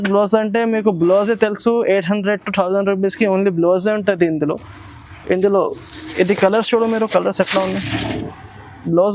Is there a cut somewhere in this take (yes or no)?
yes